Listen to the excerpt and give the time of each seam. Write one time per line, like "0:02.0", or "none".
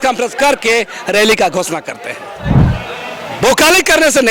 0:02.6